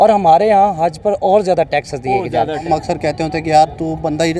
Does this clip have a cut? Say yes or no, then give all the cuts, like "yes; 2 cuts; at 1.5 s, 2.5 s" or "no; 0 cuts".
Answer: yes; 1 cut; at 2.7 s